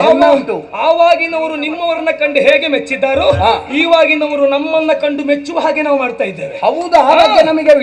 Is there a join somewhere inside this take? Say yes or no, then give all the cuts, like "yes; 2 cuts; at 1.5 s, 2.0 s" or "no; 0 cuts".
no; 0 cuts